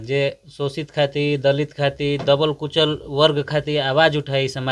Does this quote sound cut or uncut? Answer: uncut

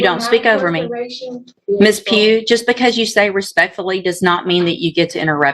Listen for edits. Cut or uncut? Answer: cut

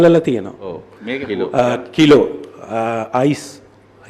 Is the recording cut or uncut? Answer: uncut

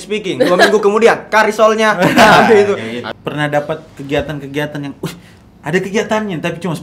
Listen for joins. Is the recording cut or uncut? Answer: cut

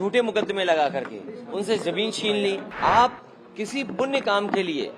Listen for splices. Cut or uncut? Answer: cut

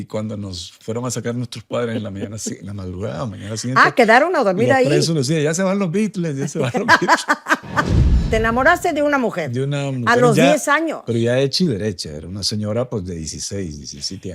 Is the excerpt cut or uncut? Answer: cut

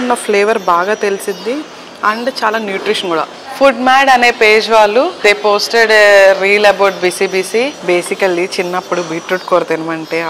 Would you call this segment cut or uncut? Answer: cut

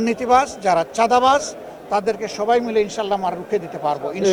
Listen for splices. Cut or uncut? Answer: uncut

